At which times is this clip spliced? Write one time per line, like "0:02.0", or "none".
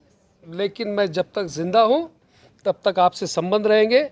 none